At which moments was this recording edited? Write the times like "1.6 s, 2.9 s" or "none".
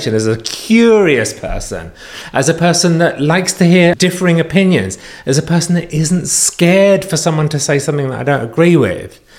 3.9 s